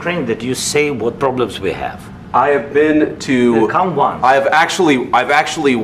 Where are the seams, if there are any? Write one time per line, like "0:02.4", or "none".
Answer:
none